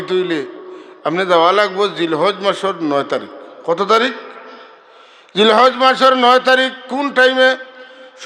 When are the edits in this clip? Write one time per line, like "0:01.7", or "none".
none